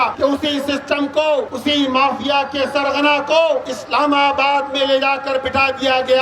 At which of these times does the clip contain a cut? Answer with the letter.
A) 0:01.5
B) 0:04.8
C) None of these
A